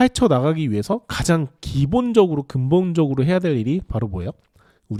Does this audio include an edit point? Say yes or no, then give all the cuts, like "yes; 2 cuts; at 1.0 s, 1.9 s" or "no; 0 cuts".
no; 0 cuts